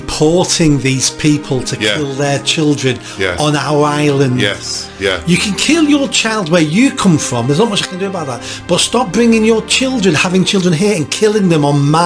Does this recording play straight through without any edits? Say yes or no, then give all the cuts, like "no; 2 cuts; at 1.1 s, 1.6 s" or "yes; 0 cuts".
yes; 0 cuts